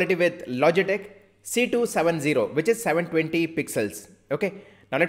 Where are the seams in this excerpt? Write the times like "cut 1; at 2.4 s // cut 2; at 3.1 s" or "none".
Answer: none